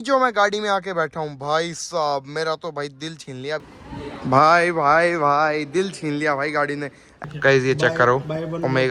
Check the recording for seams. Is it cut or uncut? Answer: cut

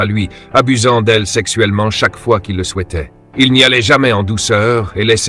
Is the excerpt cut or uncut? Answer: uncut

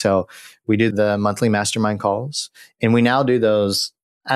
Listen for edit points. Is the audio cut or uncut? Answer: cut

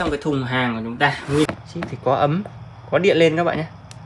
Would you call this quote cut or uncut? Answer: cut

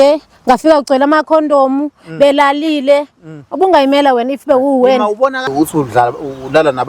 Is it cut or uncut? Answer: cut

